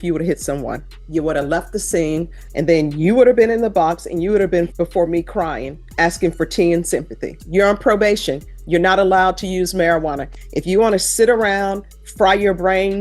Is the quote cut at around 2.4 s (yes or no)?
yes